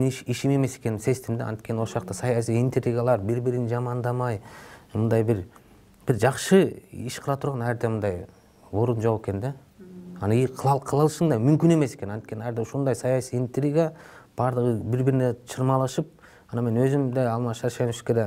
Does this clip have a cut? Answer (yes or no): no